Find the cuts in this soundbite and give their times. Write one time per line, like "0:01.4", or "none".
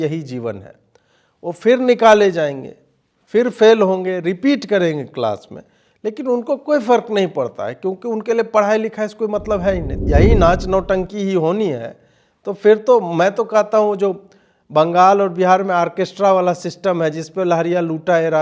0:09.9